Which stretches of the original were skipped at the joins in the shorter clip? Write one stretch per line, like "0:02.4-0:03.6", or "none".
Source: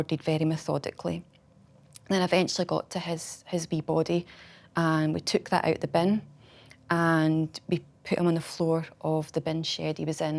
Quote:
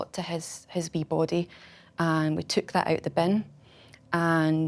none